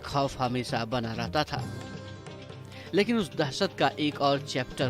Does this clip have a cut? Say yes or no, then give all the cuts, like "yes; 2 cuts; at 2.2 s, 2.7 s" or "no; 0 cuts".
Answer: no; 0 cuts